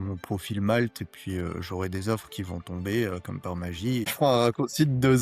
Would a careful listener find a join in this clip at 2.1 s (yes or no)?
no